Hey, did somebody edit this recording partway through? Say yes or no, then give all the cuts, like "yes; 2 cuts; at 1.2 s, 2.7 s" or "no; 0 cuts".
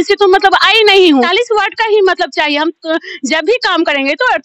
yes; 1 cut; at 1.3 s